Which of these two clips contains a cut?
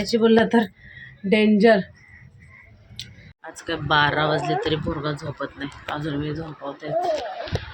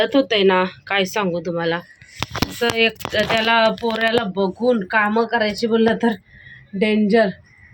first; 1 cut; at 3.4 s

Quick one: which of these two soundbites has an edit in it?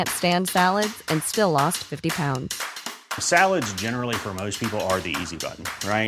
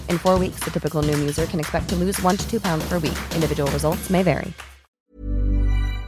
second; 1 cut; at 4.8 s

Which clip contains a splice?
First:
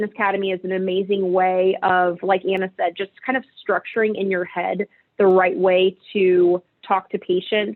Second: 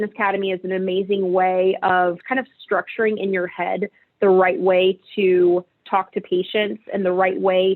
second; 1 cut; at 2.2 s

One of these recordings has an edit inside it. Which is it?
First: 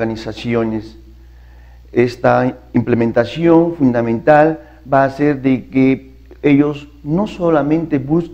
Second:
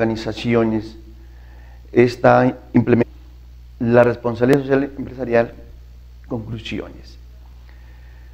first; 1 cut; at 3.0 s

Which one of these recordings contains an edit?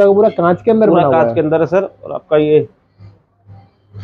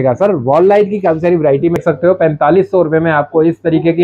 second; 1 cut; at 1.8 s

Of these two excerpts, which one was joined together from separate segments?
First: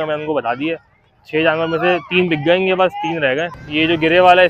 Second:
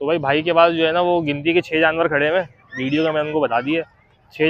first; 1 cut; at 3.6 s

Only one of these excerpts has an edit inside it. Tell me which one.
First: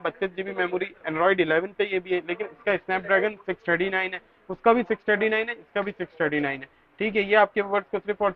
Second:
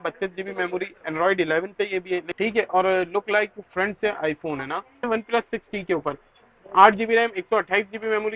second; 2 cuts; at 2.3 s, 5.0 s

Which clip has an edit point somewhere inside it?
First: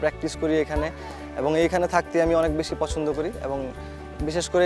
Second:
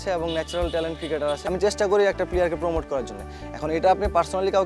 second; 1 cut; at 1.4 s

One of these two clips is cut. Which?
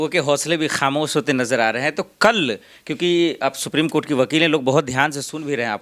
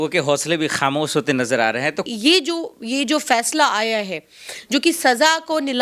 second; 1 cut; at 2.1 s

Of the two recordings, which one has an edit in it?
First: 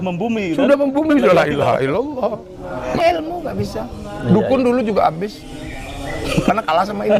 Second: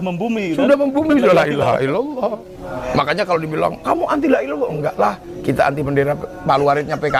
first; 1 cut; at 3.0 s

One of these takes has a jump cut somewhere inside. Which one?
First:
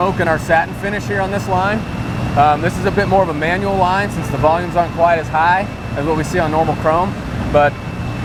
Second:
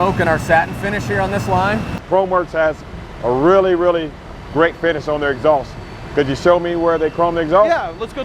second; 1 cut; at 2.0 s

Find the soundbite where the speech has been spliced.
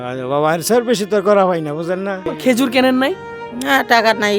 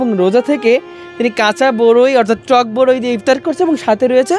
first; 1 cut; at 2.3 s

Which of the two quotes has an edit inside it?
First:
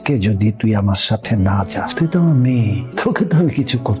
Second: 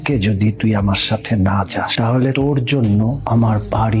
first; 2 cuts; at 1.9 s, 2.8 s

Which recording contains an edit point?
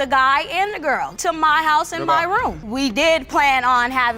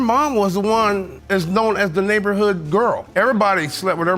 first; 2 cuts; at 1.1 s, 2.6 s

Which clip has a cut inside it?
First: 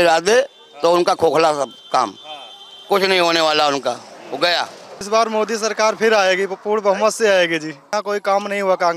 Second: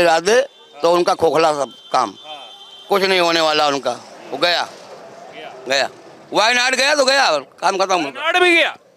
first; 2 cuts; at 5.0 s, 7.9 s

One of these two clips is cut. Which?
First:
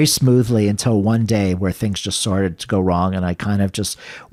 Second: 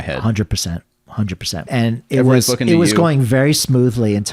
second; 1 cut; at 1.6 s

